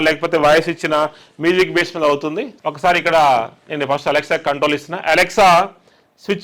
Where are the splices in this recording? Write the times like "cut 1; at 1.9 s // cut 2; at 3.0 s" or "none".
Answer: cut 1; at 2.5 s

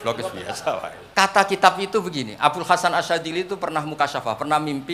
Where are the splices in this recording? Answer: cut 1; at 1.0 s

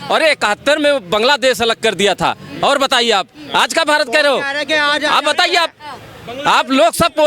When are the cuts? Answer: none

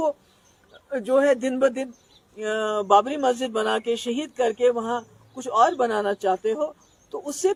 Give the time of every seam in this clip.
none

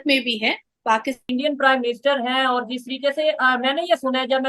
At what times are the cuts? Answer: cut 1; at 1.3 s

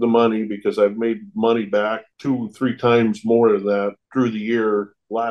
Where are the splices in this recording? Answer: none

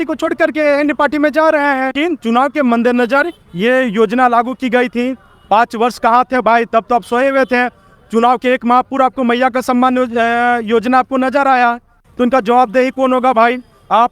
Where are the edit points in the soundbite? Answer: cut 1; at 1.9 s // cut 2; at 11.9 s

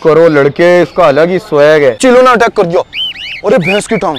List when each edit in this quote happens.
cut 1; at 2.0 s

